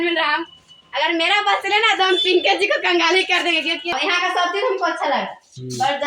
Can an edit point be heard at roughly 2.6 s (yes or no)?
no